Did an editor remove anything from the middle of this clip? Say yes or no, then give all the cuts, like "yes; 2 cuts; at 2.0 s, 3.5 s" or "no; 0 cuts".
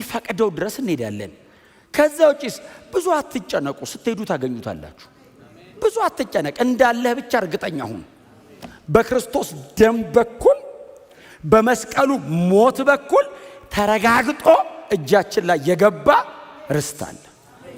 no; 0 cuts